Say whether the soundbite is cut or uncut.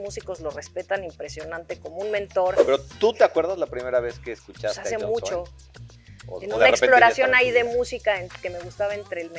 cut